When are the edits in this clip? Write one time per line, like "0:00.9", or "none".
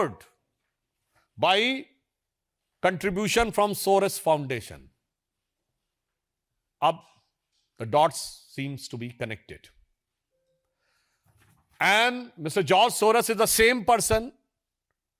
none